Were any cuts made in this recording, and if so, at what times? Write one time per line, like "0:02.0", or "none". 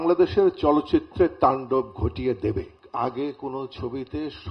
0:02.8

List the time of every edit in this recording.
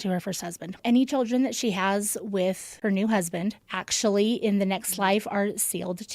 0:02.7

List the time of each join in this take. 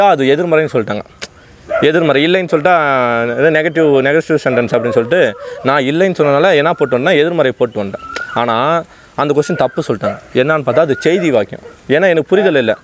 none

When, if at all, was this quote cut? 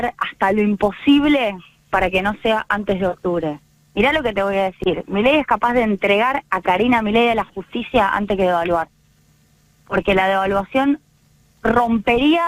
none

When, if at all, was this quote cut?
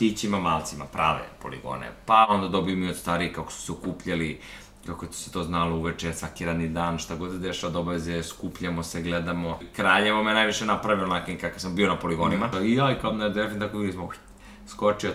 0:02.3
0:09.7
0:12.5

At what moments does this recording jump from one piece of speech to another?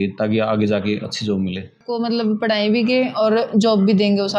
0:01.8

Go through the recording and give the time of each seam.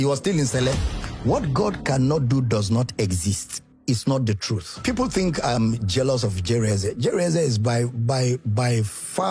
none

